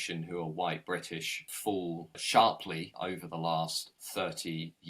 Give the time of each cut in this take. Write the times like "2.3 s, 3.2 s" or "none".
1.6 s, 2.9 s, 4.0 s